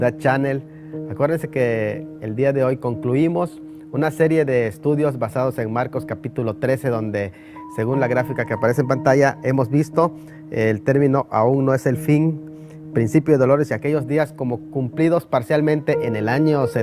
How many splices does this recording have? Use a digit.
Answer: 1